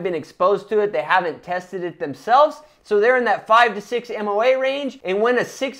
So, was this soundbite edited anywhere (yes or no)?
no